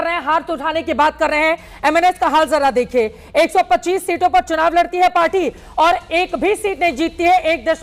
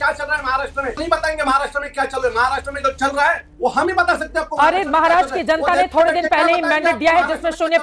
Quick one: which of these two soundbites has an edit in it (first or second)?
second